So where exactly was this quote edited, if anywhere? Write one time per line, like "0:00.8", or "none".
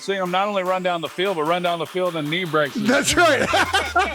0:02.7